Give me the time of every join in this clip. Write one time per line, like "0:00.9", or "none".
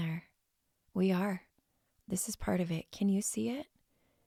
none